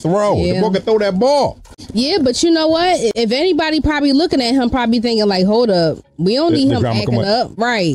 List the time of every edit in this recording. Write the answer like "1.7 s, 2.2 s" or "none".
none